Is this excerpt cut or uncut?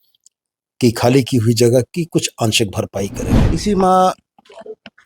cut